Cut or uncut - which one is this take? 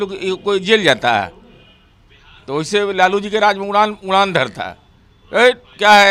uncut